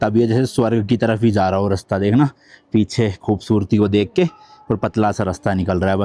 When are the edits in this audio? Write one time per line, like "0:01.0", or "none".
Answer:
none